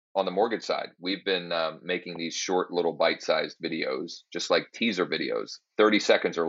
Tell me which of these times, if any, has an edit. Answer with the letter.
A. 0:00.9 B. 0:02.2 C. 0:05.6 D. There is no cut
C